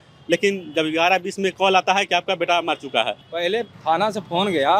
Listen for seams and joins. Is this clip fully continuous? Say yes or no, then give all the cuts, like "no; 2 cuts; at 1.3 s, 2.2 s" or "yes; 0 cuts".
yes; 0 cuts